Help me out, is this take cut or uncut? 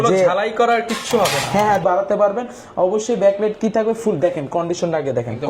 cut